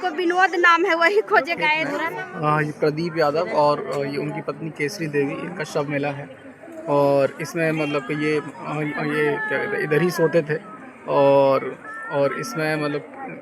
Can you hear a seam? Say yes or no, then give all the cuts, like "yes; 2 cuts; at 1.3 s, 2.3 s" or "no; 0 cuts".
yes; 1 cut; at 2.0 s